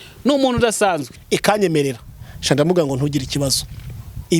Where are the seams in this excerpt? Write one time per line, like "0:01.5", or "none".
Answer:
0:01.1